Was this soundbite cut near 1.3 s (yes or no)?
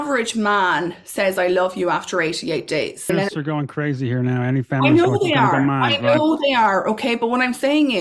no